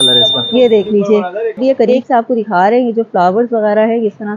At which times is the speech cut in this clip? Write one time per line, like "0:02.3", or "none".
0:01.6